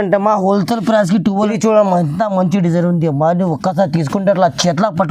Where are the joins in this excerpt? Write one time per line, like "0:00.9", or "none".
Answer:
0:01.5